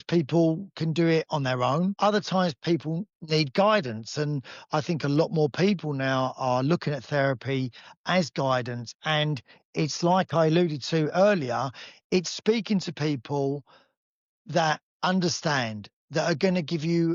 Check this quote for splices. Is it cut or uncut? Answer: cut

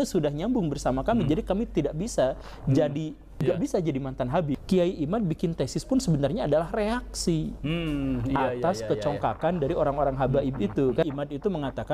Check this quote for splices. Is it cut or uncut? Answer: cut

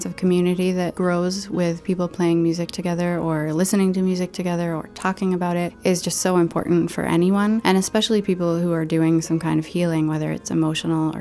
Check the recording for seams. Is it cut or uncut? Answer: cut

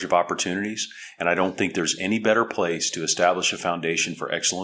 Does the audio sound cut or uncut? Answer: uncut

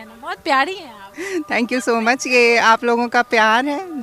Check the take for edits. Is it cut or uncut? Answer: uncut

